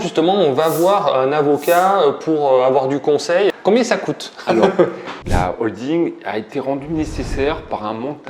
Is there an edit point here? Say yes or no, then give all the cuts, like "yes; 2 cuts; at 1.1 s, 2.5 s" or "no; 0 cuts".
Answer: yes; 2 cuts; at 3.5 s, 5.2 s